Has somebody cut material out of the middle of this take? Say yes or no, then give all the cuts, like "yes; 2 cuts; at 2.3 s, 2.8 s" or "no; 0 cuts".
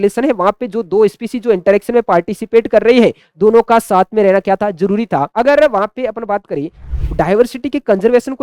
yes; 2 cuts; at 5.3 s, 6.9 s